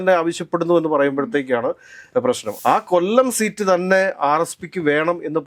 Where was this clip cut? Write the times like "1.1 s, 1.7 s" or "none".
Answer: 2.5 s